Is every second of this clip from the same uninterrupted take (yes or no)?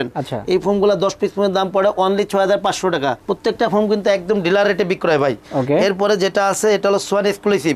yes